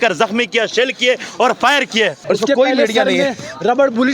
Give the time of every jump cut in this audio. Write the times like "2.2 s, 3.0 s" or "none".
2.2 s